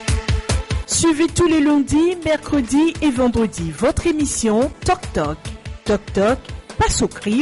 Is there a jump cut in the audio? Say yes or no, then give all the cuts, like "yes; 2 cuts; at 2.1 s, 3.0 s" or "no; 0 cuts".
yes; 1 cut; at 4.9 s